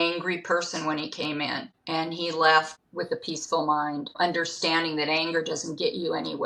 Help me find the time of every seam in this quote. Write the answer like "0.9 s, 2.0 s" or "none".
1.7 s, 4.2 s

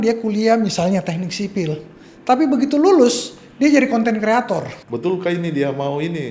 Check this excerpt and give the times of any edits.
4.8 s

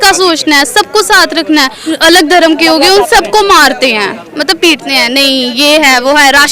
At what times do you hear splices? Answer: 1.8 s

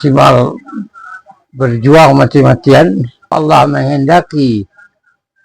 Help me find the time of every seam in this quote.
3.3 s

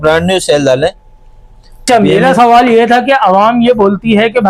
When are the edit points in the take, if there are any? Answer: 1.9 s

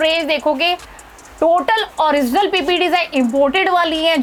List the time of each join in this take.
none

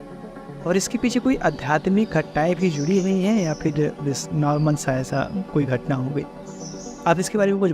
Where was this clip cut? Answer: none

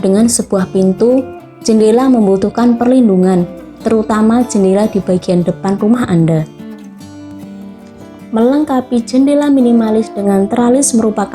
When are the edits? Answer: 6.5 s, 8.3 s

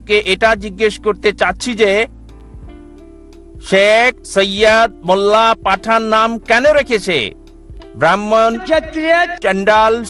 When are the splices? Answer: none

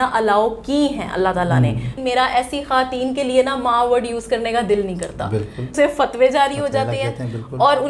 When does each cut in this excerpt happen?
1.9 s, 5.7 s

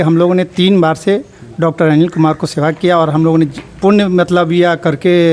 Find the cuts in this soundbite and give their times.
none

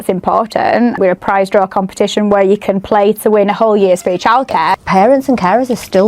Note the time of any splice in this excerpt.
1.0 s, 4.8 s

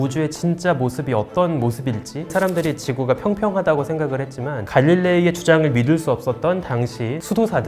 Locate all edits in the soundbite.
2.3 s, 4.6 s

